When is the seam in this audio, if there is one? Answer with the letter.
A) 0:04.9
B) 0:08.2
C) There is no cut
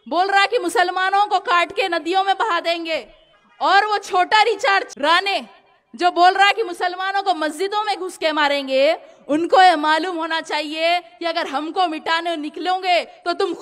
A